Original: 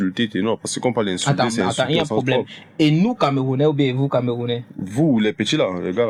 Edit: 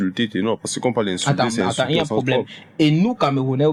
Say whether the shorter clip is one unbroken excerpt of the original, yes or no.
yes